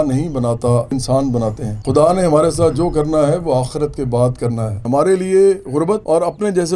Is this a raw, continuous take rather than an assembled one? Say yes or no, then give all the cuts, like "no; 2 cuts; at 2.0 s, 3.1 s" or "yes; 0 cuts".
no; 3 cuts; at 0.9 s, 1.7 s, 4.8 s